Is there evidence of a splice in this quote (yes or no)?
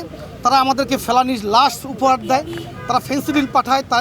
no